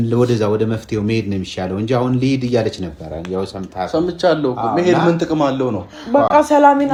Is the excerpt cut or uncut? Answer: uncut